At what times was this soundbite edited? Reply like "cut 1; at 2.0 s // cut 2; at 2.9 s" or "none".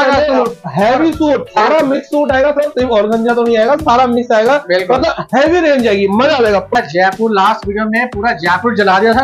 cut 1; at 6.7 s